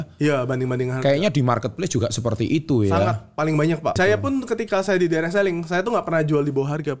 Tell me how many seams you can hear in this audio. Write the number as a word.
one